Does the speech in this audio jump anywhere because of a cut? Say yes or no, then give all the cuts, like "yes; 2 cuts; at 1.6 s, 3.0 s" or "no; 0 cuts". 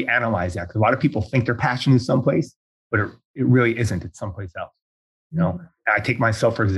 no; 0 cuts